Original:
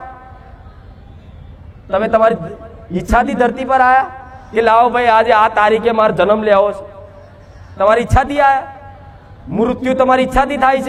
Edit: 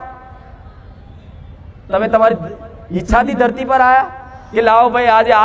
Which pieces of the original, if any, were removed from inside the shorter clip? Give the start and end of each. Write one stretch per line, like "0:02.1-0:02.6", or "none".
none